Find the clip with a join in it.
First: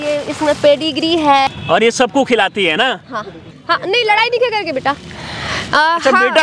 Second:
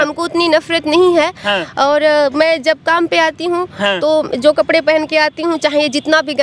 first; 2 cuts; at 1.5 s, 3.5 s

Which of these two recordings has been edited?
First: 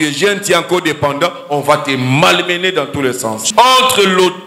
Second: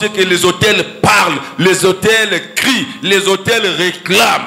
first; 1 cut; at 3.4 s

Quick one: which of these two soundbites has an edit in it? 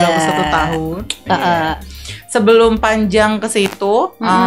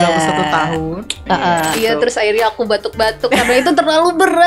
second; 1 cut; at 1.8 s

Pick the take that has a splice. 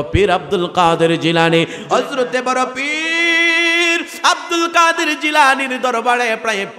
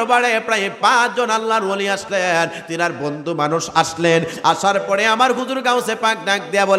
first; 1 cut; at 1.8 s

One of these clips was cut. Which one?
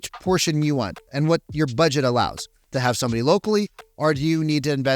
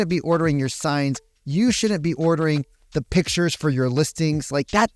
first; 1 cut; at 2.6 s

